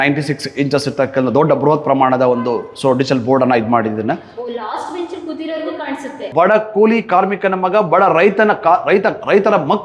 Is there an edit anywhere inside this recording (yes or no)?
yes